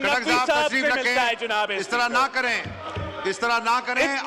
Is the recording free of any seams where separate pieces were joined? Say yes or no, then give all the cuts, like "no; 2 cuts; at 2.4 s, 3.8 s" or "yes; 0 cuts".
yes; 0 cuts